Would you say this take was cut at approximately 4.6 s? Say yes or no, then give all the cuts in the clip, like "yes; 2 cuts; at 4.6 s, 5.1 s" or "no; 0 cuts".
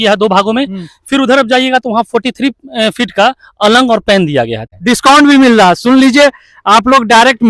yes; 1 cut; at 4.6 s